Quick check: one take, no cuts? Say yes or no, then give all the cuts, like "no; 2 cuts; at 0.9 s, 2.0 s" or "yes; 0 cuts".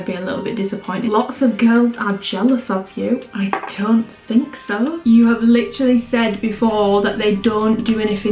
no; 2 cuts; at 1.1 s, 5.0 s